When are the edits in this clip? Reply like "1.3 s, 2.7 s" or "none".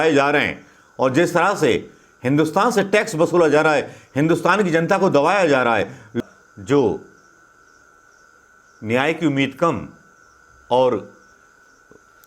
6.2 s